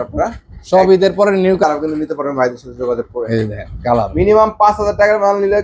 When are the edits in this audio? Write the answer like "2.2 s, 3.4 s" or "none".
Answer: 1.6 s